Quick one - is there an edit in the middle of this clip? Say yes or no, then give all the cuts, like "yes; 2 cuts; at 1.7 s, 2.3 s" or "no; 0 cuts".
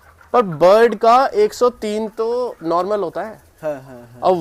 no; 0 cuts